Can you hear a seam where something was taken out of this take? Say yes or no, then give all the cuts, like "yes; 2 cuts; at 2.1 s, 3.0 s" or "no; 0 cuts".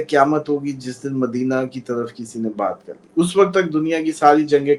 no; 0 cuts